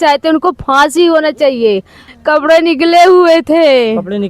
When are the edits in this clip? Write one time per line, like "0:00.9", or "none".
0:02.0